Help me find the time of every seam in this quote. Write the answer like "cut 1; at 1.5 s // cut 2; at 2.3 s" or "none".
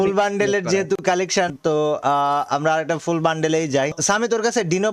cut 1; at 1.5 s // cut 2; at 4.0 s